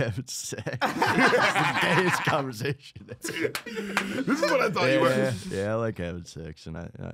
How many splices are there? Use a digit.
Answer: 0